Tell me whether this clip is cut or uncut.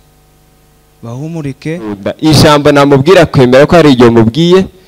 cut